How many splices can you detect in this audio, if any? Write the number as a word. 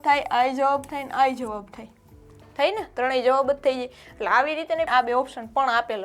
one